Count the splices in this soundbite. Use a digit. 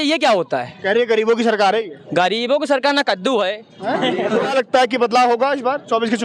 1